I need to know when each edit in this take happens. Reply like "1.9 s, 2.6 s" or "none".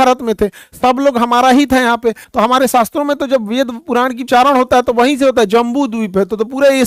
2.2 s, 4.2 s